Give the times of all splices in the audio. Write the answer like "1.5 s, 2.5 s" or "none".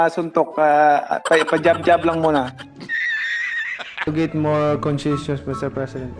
2.6 s, 4.0 s